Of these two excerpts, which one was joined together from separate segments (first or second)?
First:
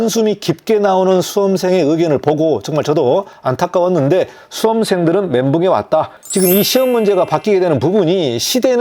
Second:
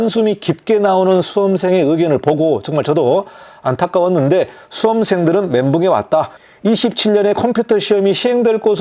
first